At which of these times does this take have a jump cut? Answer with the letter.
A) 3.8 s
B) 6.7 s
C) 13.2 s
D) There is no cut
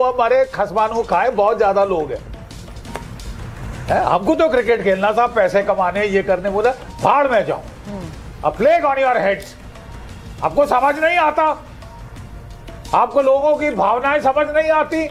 D